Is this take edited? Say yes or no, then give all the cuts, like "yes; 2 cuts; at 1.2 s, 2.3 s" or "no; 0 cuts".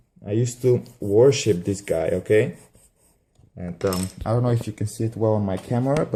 no; 0 cuts